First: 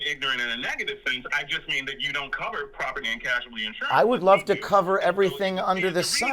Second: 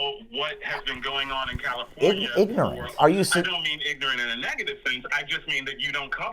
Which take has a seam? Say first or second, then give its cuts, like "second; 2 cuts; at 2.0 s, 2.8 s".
second; 1 cut; at 2.8 s